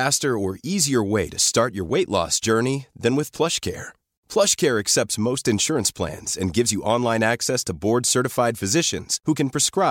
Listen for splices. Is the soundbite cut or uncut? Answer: uncut